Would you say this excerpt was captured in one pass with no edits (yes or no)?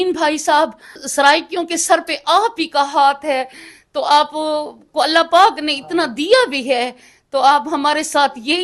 no